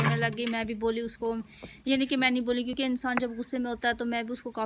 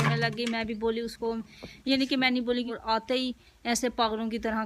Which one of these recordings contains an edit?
second; 1 cut; at 2.7 s

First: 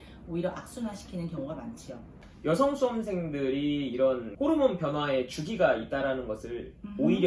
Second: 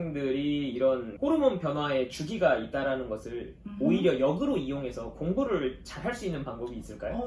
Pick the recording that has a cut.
first; 1 cut; at 2.3 s

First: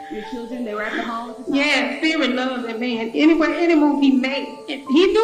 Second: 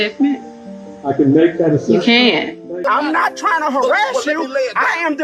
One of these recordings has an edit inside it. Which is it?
second; 1 cut; at 2.7 s

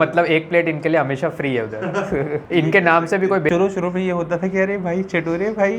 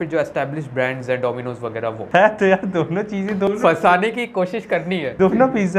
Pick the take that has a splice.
first; 1 cut; at 3.5 s

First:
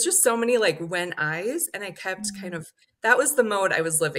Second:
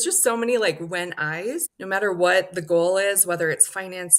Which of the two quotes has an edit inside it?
second; 1 cut; at 1.7 s

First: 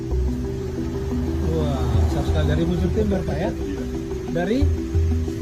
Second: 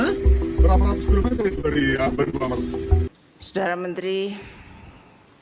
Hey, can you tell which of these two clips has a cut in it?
second; 1 cut; at 3.0 s

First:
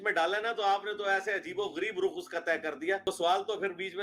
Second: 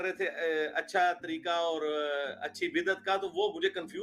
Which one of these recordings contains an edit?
first; 1 cut; at 3.1 s

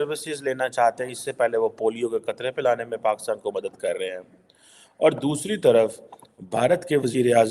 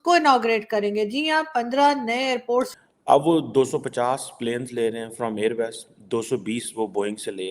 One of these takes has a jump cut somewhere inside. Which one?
second; 1 cut; at 2.7 s

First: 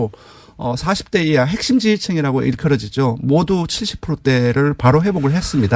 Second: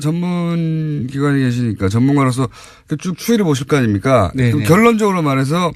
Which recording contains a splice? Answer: second; 1 cut; at 3.6 s

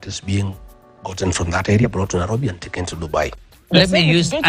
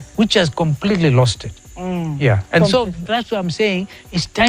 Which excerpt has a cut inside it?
first; 1 cut; at 3.3 s

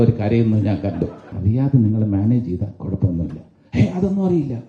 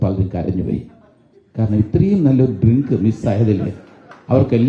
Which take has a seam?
first; 1 cut; at 1.3 s

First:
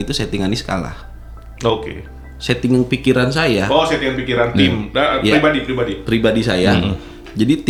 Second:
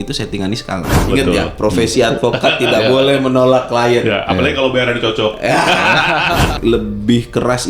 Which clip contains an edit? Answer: second; 2 cuts; at 1.0 s, 6.6 s

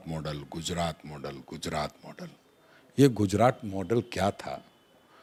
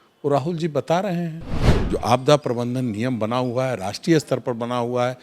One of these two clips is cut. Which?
second; 1 cut; at 1.7 s

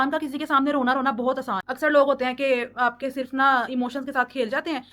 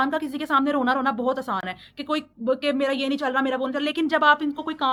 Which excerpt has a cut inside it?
first; 1 cut; at 1.7 s

